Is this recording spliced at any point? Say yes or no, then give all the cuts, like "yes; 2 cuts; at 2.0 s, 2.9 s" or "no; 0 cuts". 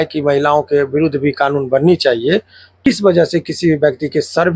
yes; 1 cut; at 2.9 s